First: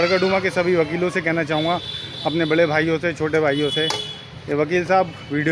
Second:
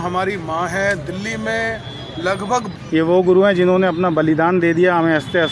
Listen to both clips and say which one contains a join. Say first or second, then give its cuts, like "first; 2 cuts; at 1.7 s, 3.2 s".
second; 1 cut; at 2.7 s